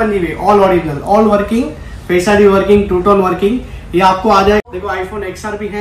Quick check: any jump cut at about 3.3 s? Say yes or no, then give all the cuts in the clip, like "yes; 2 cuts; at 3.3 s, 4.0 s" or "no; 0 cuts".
no; 1 cut; at 4.7 s